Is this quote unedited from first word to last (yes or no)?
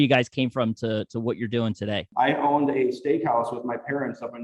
no